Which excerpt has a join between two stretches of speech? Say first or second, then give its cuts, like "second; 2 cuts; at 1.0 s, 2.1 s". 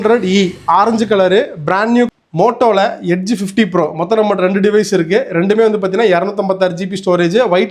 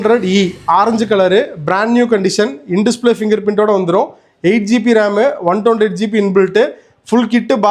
first; 1 cut; at 2.1 s